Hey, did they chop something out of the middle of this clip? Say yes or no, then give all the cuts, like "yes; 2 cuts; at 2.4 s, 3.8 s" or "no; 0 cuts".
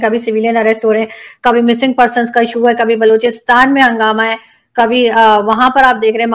no; 0 cuts